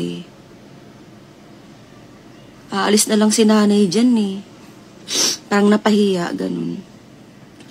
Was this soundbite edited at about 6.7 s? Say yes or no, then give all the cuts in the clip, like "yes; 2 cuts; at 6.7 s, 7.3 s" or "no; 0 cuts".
yes; 1 cut; at 6.7 s